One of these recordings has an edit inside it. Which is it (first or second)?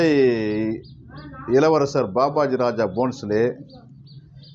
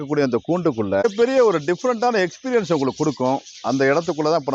second